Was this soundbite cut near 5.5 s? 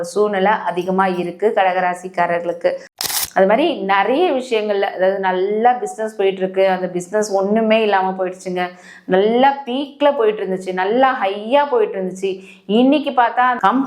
no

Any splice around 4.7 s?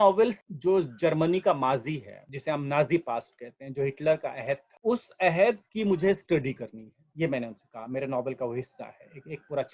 yes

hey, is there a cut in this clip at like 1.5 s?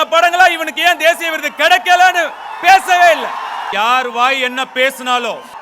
no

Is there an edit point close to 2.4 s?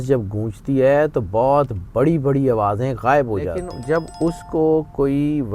no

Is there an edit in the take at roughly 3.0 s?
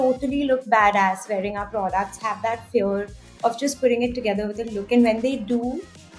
no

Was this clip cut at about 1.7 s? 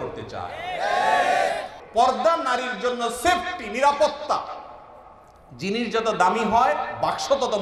yes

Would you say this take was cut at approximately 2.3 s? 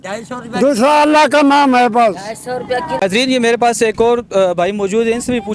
no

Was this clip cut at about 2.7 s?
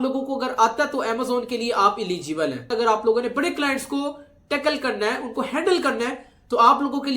yes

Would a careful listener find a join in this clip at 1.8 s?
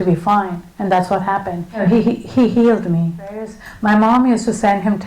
yes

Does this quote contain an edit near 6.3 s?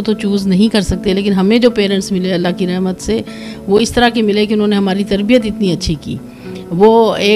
no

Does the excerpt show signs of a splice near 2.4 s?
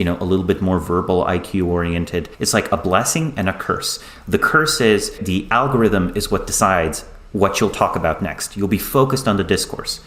yes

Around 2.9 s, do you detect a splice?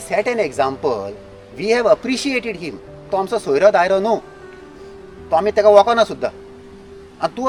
no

